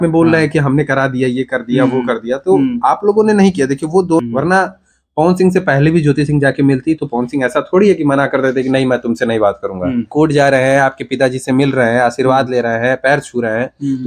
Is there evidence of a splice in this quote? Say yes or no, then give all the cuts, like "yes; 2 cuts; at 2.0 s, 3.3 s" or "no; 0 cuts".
yes; 2 cuts; at 4.2 s, 10.1 s